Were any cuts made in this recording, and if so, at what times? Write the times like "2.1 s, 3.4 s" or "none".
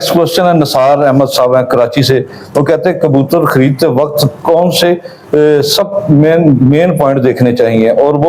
none